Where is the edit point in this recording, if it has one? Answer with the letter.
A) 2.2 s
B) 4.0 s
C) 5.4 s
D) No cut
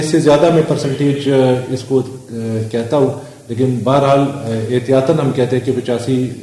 D